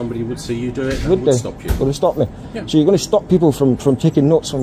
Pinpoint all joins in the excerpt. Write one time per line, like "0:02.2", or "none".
0:03.4